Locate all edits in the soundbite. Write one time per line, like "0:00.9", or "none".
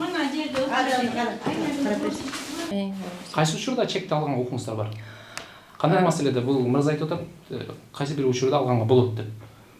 0:02.7